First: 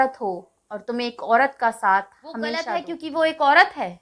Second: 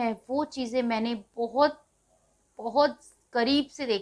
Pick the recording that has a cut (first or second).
first